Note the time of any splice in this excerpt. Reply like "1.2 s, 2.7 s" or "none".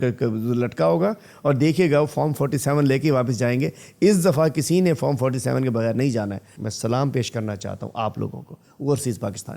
6.5 s

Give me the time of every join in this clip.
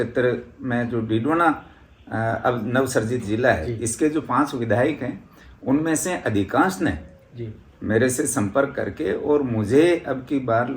none

